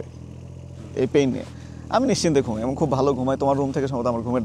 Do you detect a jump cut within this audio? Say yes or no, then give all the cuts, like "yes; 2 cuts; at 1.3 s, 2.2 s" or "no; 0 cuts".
no; 0 cuts